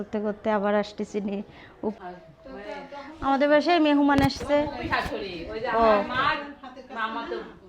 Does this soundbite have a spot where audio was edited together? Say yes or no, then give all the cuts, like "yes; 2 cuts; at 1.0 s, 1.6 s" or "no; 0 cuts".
yes; 1 cut; at 2.0 s